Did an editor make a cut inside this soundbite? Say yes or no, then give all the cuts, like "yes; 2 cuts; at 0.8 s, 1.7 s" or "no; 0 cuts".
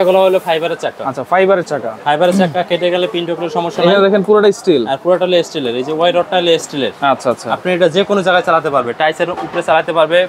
no; 0 cuts